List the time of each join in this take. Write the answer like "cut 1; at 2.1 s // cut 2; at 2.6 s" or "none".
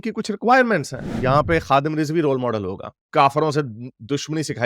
cut 1; at 1.0 s // cut 2; at 3.0 s

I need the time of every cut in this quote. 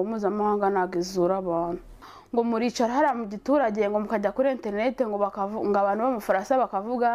cut 1; at 2.1 s

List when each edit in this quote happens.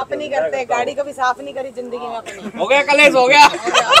none

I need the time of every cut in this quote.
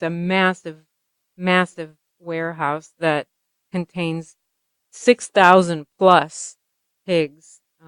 none

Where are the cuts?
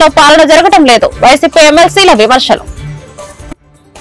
cut 1; at 2.8 s

